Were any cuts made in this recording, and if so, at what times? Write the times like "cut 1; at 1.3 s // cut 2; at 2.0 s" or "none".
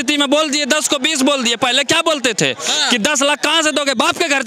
none